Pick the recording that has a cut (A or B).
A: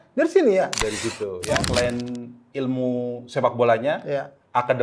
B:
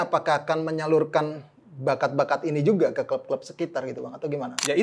A